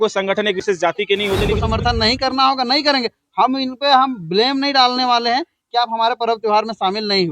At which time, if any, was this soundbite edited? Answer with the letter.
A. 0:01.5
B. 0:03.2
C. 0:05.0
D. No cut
A